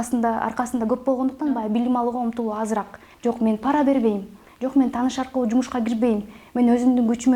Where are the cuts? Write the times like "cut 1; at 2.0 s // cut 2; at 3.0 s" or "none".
cut 1; at 3.0 s